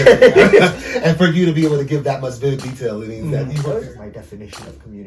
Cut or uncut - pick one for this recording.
cut